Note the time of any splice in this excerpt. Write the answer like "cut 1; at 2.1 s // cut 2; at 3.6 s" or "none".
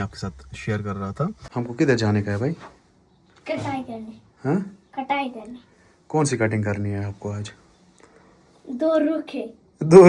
cut 1; at 1.4 s